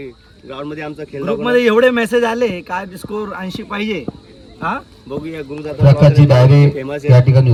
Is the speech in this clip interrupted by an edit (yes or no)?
no